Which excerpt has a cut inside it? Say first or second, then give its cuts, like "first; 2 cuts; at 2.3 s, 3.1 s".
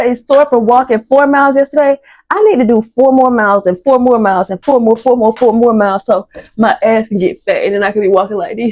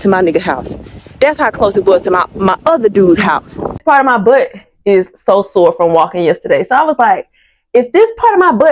second; 1 cut; at 3.8 s